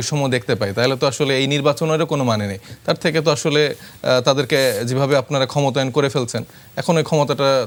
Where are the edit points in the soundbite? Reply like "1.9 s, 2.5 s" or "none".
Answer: none